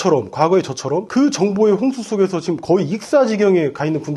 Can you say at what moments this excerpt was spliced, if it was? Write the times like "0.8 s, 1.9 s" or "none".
1.1 s